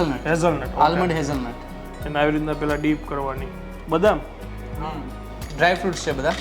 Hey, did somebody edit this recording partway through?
no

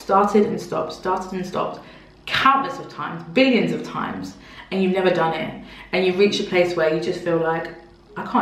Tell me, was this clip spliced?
no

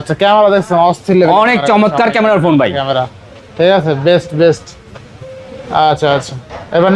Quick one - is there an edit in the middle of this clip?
no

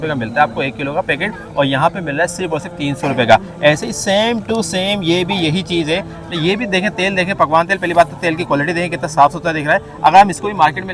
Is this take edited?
no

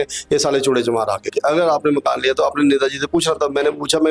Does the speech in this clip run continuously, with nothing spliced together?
no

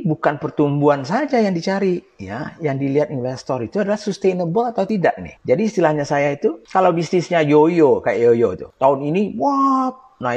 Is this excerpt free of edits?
no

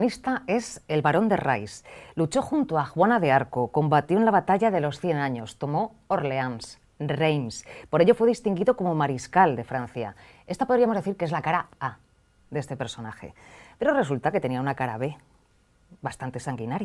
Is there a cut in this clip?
yes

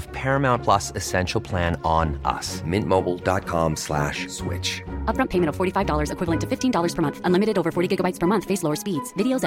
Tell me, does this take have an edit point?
no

